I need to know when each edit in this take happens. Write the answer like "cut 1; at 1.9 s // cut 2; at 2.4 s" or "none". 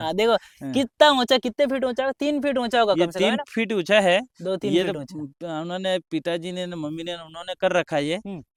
none